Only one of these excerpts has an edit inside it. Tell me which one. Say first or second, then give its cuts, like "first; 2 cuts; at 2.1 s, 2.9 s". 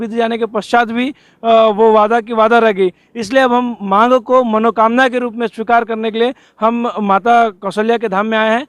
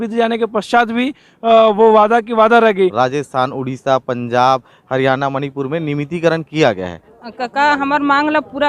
second; 2 cuts; at 2.9 s, 7.1 s